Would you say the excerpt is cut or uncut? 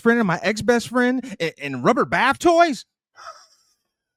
uncut